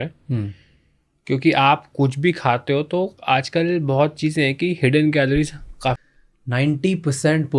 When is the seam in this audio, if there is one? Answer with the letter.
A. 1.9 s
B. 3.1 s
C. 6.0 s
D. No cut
C